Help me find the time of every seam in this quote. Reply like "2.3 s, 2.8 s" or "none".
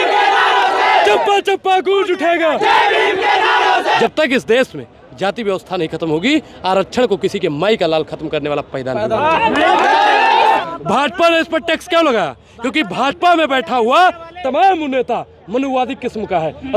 4.0 s, 10.6 s